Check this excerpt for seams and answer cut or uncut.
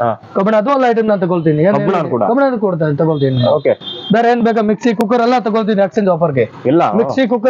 uncut